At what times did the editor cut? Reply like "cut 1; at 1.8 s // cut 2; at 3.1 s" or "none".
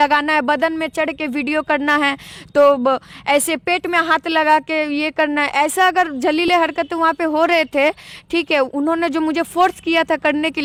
none